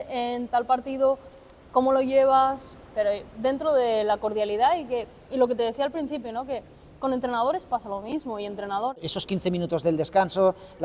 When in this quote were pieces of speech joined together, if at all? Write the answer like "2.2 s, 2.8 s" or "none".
9.0 s